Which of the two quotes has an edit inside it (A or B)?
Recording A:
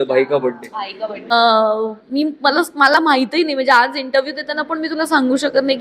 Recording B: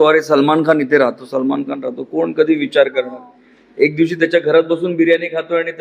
A